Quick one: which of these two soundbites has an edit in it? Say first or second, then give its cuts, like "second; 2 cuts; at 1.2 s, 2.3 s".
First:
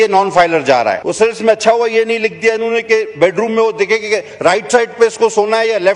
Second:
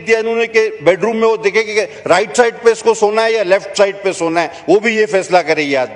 first; 1 cut; at 1.1 s